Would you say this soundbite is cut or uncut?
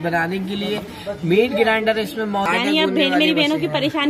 cut